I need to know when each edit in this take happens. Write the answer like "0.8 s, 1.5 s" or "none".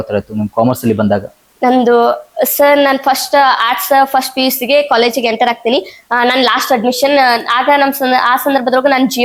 none